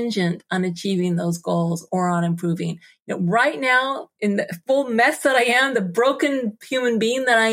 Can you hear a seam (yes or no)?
yes